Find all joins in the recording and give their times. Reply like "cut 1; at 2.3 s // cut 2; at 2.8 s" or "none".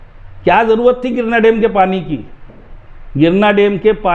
none